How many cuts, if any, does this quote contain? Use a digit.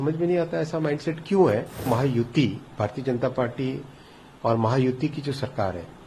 1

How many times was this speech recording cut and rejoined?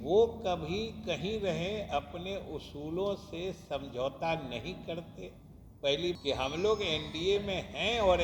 1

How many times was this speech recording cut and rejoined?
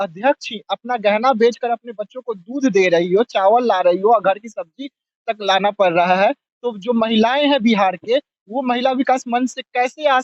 0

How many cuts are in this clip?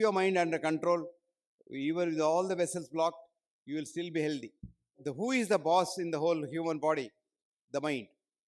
1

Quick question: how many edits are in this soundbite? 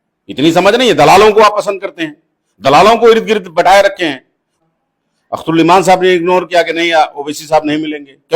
1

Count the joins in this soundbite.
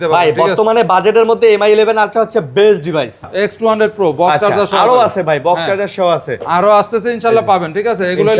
1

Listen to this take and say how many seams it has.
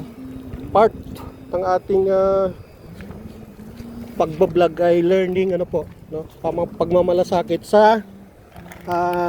0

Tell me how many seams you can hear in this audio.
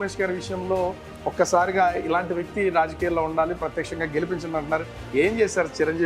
0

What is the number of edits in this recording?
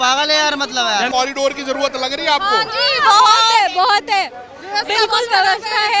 1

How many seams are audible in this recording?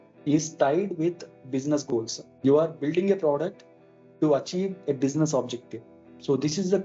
1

